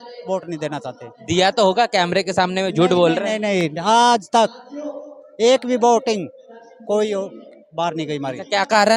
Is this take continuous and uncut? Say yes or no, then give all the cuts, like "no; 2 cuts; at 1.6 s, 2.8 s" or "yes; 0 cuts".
yes; 0 cuts